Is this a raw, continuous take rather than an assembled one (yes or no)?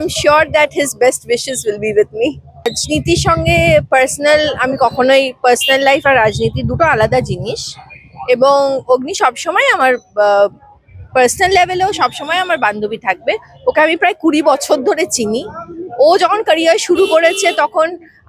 no